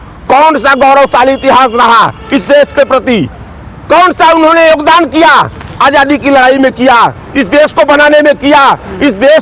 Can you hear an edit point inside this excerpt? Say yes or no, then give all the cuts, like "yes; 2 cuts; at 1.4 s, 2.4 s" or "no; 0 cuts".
no; 0 cuts